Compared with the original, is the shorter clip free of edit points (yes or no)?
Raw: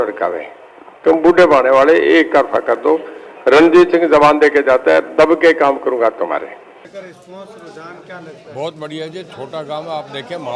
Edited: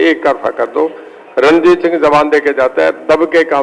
yes